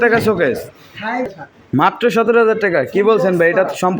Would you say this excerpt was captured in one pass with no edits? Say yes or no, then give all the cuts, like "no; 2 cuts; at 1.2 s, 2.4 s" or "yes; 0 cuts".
no; 1 cut; at 1.3 s